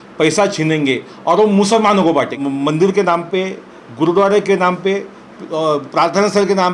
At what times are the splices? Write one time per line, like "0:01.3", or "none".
0:02.4

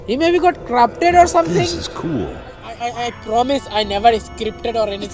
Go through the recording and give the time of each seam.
0:02.8

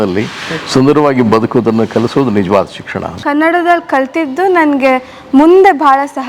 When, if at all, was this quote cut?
0:03.2

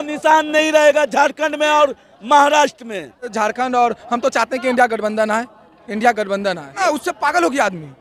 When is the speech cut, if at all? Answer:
0:03.3
0:06.8

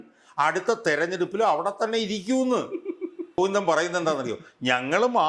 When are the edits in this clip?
0:03.4

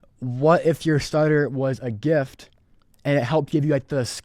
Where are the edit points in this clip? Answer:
none

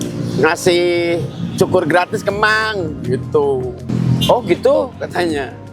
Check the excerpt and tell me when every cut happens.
0:03.9

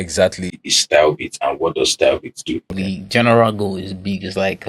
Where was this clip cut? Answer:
0:02.7

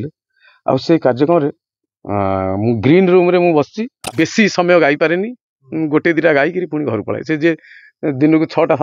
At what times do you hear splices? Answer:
0:04.0

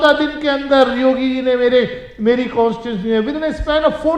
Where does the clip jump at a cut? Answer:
none

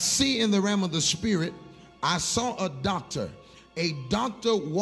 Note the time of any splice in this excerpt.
0:03.6

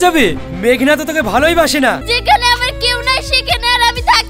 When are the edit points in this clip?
0:02.0

